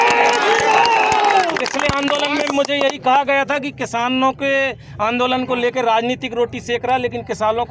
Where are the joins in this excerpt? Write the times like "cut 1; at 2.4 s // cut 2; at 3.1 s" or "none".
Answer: none